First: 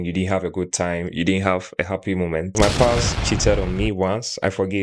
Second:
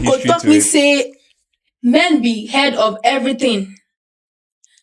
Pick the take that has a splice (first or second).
first